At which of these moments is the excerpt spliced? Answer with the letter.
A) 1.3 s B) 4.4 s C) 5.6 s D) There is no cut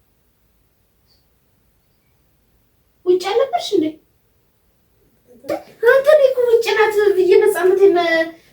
C